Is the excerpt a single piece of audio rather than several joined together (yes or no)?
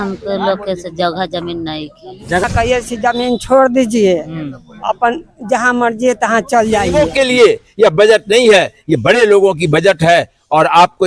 no